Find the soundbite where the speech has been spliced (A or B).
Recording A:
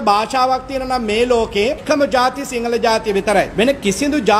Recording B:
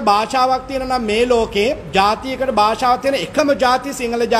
A